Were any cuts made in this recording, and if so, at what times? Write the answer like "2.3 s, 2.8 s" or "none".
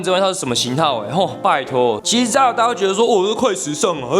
2.0 s

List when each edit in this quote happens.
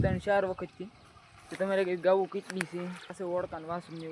3.1 s

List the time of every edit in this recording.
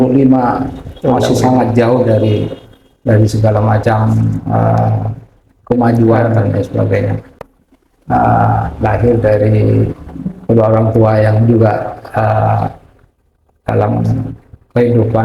none

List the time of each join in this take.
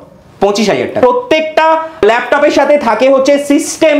1.0 s, 2.0 s

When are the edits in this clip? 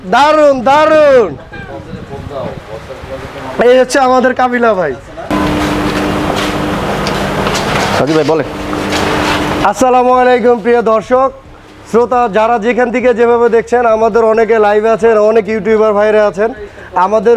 5.1 s

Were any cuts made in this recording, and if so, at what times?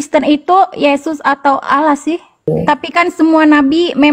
2.5 s

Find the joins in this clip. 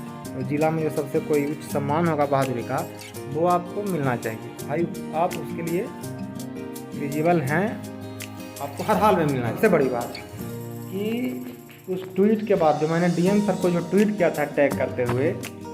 9.6 s

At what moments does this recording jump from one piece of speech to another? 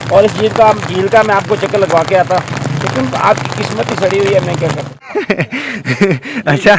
5.0 s

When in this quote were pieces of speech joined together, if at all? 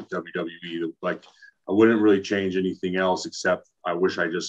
none

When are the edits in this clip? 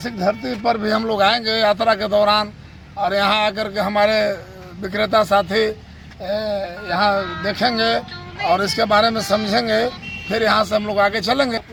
none

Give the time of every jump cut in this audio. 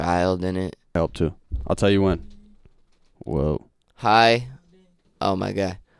0.9 s

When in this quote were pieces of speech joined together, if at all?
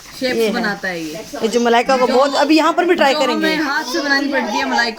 none

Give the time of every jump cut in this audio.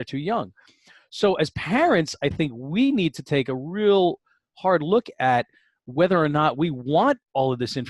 none

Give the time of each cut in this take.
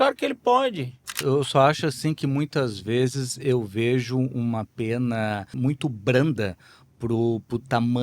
1.2 s, 5.5 s

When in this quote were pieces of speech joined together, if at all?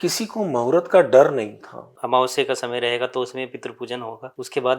1.9 s

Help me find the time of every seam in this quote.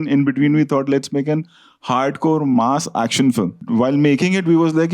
3.6 s

